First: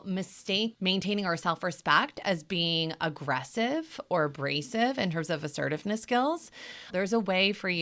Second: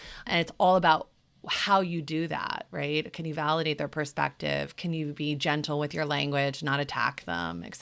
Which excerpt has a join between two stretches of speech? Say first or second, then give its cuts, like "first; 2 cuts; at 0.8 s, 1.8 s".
first; 1 cut; at 6.8 s